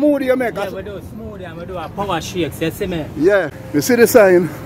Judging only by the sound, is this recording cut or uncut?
cut